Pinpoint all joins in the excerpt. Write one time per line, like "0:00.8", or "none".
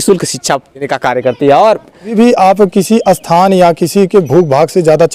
0:00.9
0:02.1